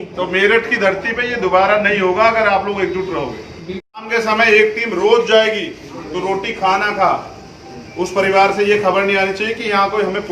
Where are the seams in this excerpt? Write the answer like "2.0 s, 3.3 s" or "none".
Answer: 4.0 s